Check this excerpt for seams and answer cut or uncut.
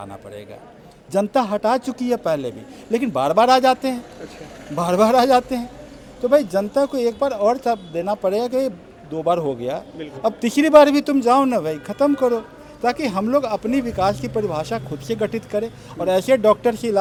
uncut